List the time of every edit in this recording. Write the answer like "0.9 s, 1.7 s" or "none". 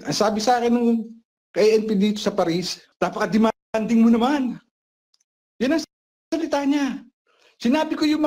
2.8 s